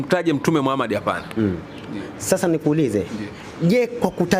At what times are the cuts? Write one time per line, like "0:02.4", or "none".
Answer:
none